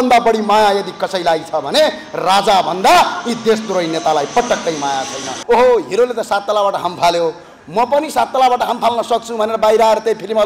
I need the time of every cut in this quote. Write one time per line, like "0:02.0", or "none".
0:05.3